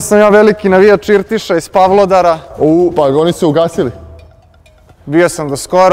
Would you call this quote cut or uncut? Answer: uncut